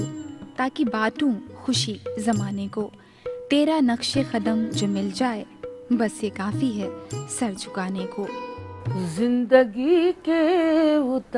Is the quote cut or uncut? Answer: cut